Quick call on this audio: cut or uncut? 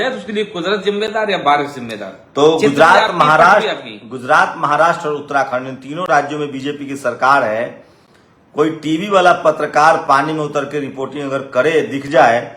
uncut